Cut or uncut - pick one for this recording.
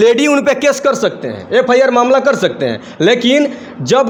uncut